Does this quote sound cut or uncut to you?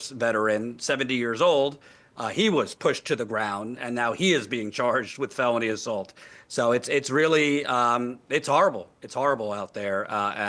cut